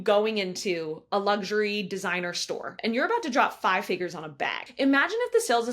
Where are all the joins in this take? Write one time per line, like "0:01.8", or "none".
0:02.7
0:04.6